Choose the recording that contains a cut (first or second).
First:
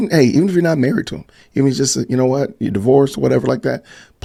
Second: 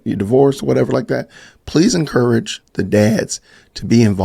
second